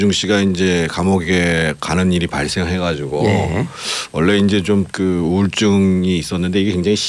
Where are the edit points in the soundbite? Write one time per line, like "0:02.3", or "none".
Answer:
0:03.1